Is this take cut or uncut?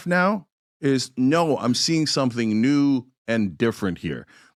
uncut